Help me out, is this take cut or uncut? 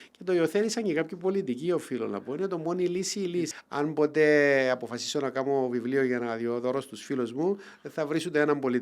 cut